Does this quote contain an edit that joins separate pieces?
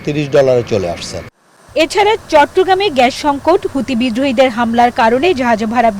no; 0 cuts

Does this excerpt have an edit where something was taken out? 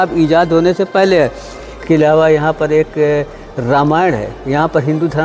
yes; 1 cut; at 1.7 s

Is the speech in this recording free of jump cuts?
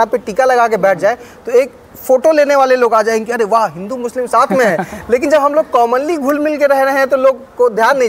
yes; 0 cuts

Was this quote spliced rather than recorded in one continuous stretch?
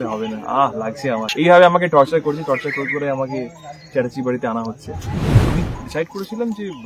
yes; 2 cuts; at 1.3 s, 5.3 s

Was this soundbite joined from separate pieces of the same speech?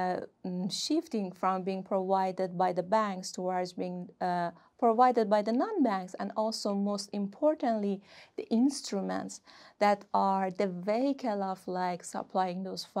no; 0 cuts

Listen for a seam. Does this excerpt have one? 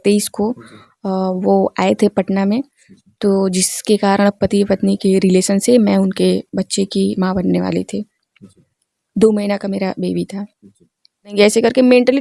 yes; 1 cut; at 11.3 s

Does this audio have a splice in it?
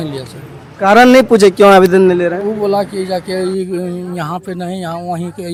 no; 0 cuts

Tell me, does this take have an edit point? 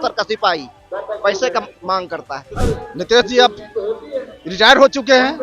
yes; 1 cut; at 2.5 s

